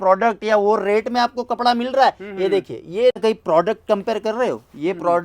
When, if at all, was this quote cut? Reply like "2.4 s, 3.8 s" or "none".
3.2 s